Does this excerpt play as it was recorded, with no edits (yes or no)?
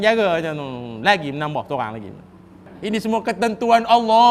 yes